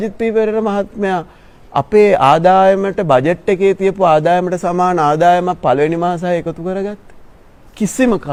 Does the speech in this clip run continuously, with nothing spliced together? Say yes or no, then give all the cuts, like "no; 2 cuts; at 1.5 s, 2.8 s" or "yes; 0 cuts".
yes; 0 cuts